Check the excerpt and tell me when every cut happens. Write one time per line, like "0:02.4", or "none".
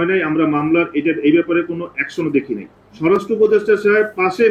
0:02.9